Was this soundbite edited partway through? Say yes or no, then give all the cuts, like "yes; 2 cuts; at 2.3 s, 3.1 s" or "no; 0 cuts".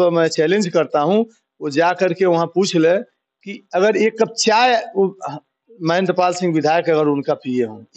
no; 0 cuts